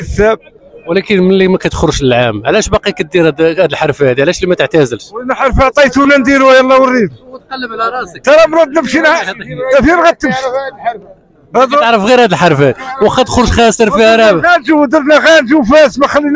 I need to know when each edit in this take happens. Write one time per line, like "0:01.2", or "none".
none